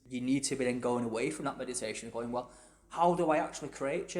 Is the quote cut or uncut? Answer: uncut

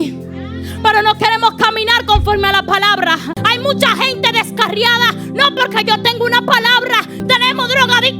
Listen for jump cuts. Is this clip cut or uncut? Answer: cut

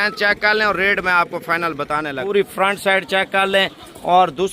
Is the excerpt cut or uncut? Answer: cut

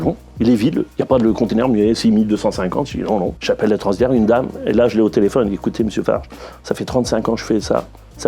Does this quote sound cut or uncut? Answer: cut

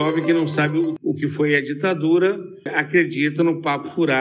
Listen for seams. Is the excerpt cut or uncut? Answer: cut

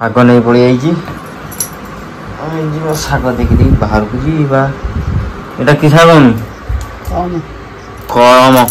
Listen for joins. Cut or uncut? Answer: uncut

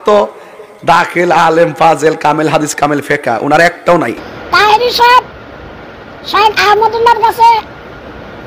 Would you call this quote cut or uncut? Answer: cut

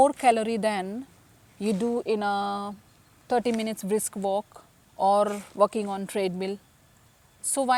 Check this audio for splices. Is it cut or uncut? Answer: uncut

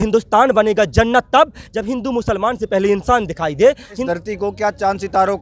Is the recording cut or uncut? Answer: cut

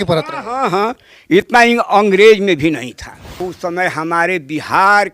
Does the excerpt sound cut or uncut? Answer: cut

